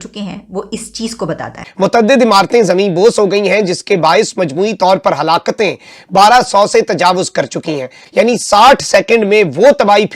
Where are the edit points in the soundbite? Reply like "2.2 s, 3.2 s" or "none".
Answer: 1.6 s, 8.0 s